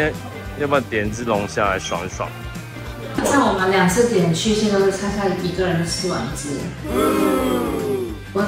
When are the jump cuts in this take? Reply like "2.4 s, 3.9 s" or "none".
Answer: 3.2 s